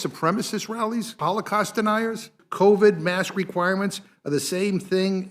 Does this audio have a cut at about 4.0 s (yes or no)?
no